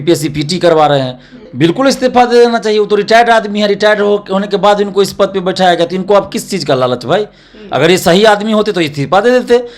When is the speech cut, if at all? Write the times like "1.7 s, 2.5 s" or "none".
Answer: 1.4 s